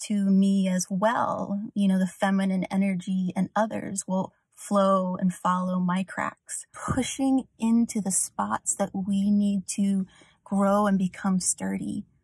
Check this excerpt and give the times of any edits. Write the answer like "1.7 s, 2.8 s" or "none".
6.7 s

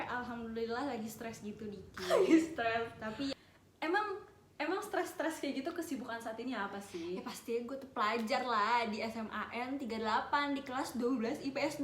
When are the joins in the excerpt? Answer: 3.3 s

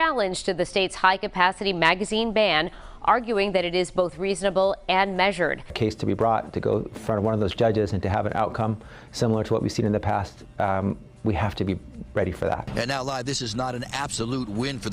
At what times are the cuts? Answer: 5.7 s, 12.6 s

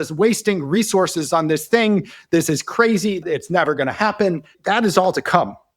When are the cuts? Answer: 3.2 s, 4.5 s

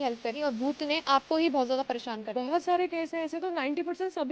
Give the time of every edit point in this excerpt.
none

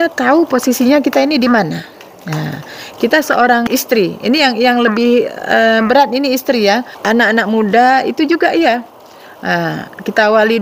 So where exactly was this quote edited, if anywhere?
3.7 s, 6.9 s

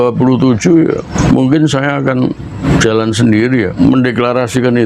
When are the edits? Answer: 1.1 s, 2.6 s, 3.7 s

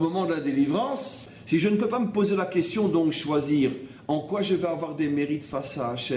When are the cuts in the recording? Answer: 1.3 s

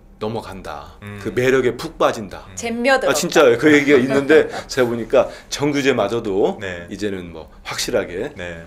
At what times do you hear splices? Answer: none

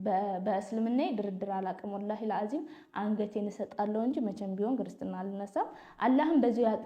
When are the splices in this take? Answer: none

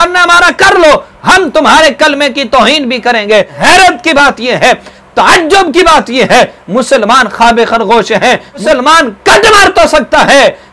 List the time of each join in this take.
3.6 s, 8.6 s

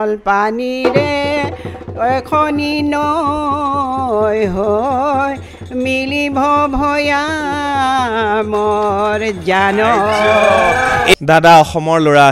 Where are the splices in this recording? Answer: 11.1 s

